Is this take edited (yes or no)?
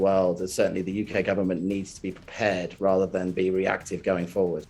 no